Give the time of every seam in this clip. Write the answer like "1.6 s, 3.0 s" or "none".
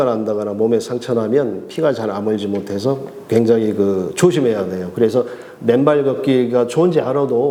none